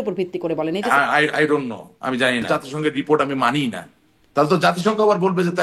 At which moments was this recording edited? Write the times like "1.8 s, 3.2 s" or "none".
0.9 s, 2.4 s